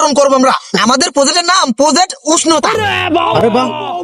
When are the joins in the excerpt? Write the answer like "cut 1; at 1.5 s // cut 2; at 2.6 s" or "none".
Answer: none